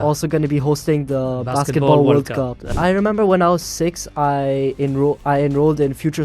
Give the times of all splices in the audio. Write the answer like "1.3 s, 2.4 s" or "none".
2.6 s